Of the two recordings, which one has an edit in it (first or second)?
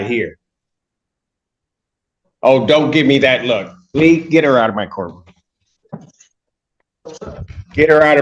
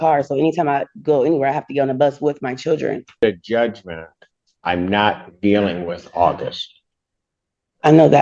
second